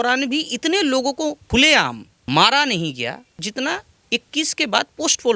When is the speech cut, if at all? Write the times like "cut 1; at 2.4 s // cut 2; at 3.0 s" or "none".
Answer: cut 1; at 1.6 s // cut 2; at 3.3 s